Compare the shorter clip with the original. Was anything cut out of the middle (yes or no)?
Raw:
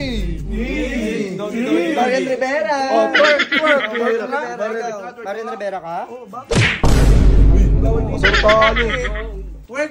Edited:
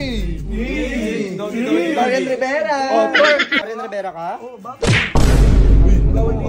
yes